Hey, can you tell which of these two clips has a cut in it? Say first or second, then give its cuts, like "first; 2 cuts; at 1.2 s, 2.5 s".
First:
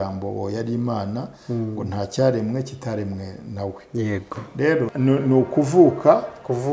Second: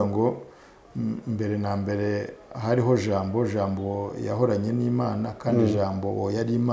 first; 1 cut; at 4.9 s